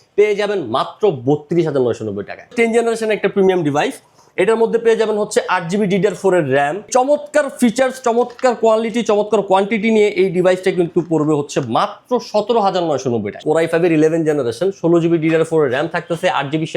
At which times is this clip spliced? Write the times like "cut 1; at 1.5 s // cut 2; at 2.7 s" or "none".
cut 1; at 2.5 s // cut 2; at 6.9 s // cut 3; at 13.4 s